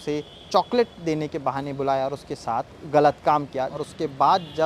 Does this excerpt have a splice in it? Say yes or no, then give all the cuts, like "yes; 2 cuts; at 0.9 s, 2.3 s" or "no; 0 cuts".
yes; 1 cut; at 3.7 s